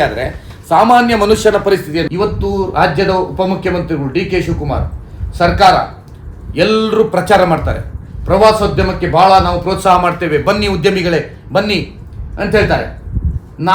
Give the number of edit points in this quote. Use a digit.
1